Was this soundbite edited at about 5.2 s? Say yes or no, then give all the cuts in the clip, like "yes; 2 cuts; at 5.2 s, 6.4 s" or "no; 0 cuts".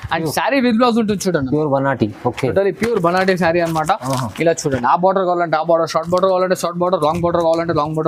no; 0 cuts